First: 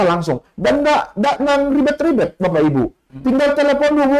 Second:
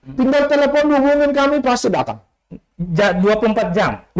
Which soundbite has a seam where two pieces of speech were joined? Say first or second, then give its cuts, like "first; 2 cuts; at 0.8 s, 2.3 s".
second; 1 cut; at 2.2 s